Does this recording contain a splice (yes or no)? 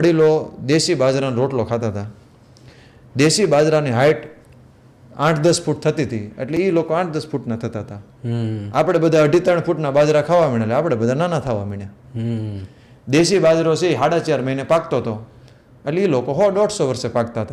no